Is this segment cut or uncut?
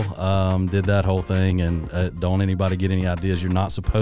uncut